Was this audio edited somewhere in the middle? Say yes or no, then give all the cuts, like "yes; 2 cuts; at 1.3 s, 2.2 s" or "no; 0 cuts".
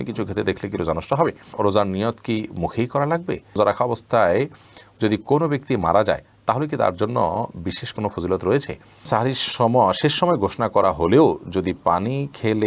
yes; 3 cuts; at 1.5 s, 3.6 s, 9.1 s